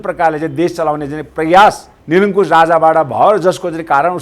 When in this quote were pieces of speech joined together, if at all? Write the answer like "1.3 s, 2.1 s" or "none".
1.9 s